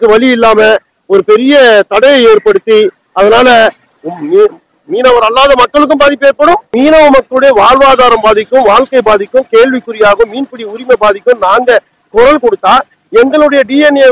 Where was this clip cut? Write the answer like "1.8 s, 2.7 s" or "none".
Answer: 6.7 s